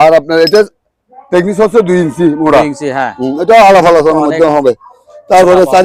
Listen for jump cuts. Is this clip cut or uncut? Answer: uncut